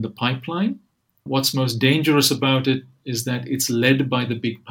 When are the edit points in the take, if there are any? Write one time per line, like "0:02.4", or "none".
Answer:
0:01.3

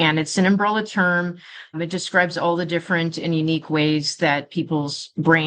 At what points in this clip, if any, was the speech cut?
0:01.8

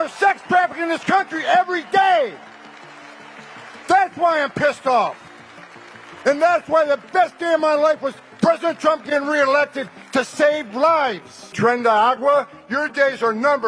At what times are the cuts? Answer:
0:11.5

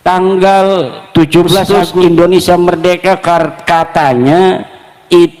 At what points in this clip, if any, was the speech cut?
0:01.8

